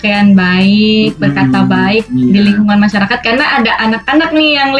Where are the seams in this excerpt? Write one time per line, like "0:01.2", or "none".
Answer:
none